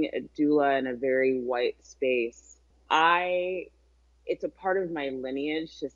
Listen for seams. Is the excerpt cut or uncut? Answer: uncut